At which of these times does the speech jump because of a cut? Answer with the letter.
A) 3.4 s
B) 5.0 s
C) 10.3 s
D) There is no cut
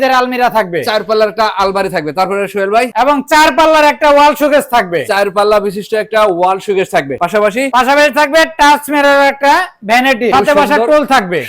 C